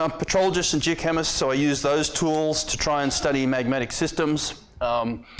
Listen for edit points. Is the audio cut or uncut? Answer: cut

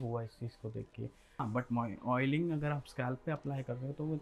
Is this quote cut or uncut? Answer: cut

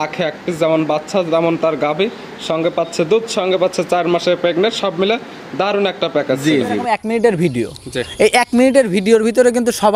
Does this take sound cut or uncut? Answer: cut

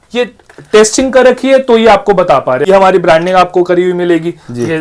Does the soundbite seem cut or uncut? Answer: cut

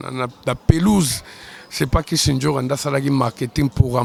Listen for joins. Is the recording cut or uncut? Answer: uncut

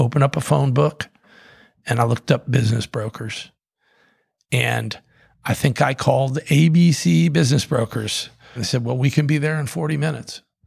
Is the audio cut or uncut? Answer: cut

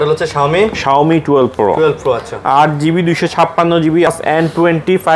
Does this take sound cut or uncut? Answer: cut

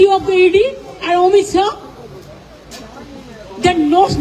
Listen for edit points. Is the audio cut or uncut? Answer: uncut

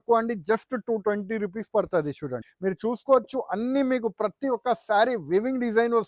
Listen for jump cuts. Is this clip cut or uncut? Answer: cut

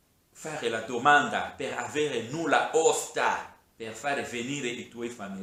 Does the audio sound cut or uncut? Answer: uncut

